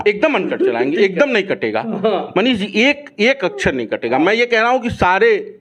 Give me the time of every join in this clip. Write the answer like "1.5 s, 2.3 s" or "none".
none